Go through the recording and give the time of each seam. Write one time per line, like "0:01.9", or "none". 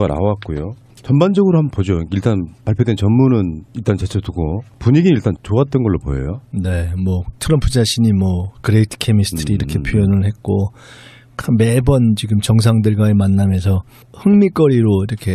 none